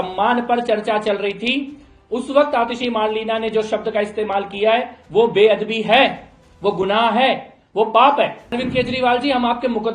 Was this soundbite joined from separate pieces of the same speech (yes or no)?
yes